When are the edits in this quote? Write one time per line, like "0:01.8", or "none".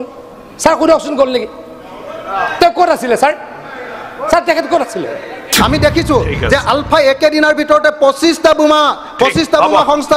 0:05.5